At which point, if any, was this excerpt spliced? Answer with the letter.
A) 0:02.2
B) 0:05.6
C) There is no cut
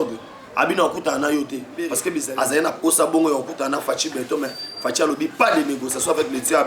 A